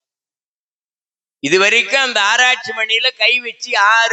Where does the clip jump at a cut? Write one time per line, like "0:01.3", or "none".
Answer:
none